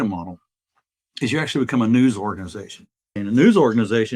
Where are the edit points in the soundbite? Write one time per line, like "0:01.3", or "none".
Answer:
0:03.2